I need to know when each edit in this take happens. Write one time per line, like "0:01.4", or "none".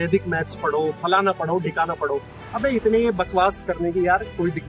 none